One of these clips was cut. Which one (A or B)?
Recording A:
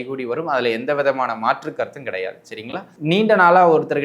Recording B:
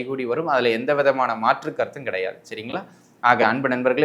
A